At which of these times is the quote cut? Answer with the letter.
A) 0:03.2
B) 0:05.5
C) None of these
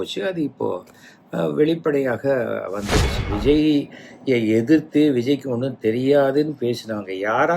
A